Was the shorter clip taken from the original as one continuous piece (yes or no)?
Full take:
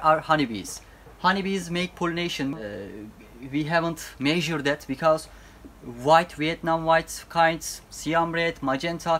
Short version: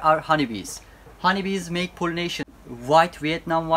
no